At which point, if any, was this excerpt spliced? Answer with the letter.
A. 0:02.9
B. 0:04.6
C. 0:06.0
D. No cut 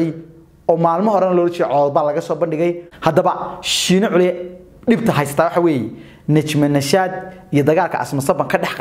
A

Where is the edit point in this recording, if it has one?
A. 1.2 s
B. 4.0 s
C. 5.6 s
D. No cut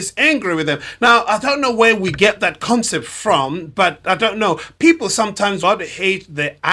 C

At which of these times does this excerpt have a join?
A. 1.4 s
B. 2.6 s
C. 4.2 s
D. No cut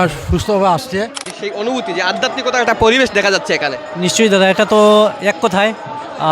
A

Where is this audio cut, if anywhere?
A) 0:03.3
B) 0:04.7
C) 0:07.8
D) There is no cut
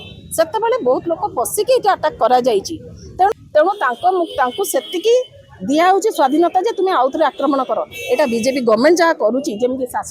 A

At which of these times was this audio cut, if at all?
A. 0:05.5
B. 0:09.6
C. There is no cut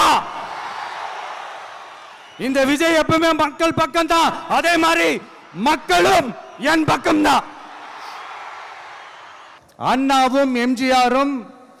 B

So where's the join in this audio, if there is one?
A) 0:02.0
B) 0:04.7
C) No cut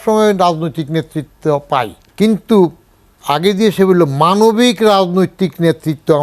A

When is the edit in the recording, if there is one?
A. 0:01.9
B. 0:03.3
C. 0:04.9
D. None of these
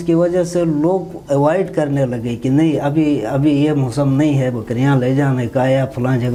D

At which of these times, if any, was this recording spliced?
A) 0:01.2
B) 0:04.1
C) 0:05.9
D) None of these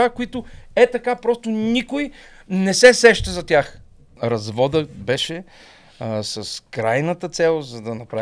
B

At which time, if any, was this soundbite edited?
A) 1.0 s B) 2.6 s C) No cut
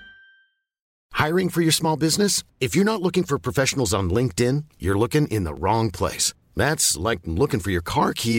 A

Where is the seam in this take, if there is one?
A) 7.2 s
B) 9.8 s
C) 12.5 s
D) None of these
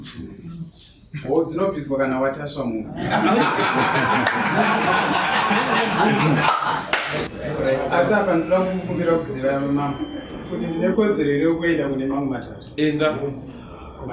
A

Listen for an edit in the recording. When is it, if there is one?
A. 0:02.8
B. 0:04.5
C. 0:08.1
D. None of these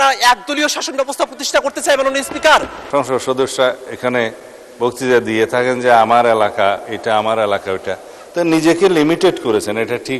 A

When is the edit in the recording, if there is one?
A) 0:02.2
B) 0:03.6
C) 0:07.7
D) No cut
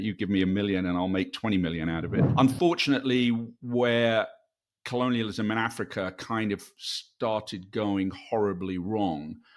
A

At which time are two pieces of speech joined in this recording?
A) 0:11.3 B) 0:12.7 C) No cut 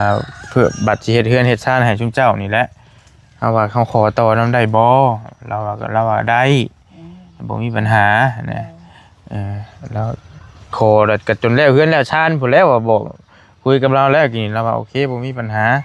C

